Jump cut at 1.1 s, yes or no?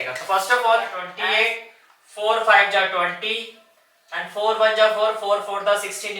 yes